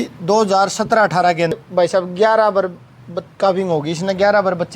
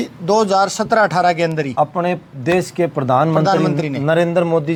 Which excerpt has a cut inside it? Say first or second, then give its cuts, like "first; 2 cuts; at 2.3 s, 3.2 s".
first; 1 cut; at 1.6 s